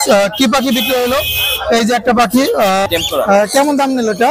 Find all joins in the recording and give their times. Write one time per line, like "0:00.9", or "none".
0:03.0